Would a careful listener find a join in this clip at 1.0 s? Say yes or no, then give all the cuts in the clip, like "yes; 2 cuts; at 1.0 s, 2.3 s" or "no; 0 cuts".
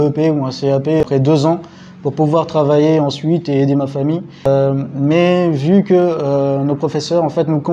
yes; 2 cuts; at 1.0 s, 4.5 s